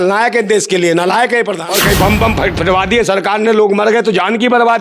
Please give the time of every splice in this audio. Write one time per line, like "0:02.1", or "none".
0:01.6